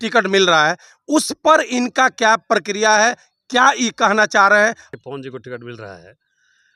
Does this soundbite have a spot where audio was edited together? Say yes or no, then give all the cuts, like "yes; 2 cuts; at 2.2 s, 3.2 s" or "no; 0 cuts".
yes; 1 cut; at 4.8 s